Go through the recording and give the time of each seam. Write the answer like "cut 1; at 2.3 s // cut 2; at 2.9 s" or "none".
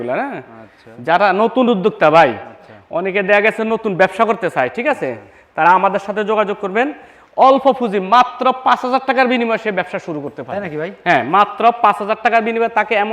none